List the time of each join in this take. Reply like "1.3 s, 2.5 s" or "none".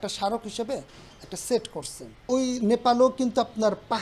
none